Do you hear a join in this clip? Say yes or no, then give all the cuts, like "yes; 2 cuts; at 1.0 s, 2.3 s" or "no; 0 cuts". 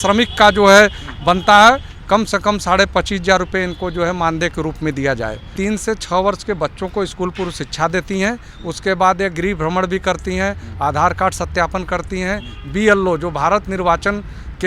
yes; 1 cut; at 5.5 s